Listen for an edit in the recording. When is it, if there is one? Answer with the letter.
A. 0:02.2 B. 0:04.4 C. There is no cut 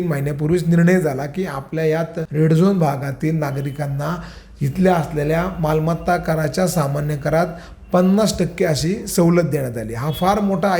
A